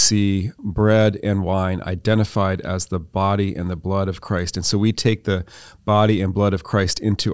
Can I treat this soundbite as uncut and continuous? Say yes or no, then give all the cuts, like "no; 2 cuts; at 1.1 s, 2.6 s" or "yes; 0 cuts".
yes; 0 cuts